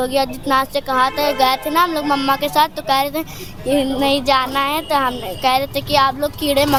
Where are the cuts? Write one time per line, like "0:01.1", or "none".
none